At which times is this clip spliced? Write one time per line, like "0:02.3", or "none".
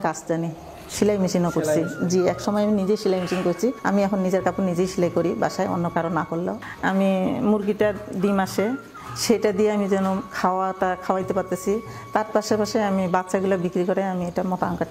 0:06.6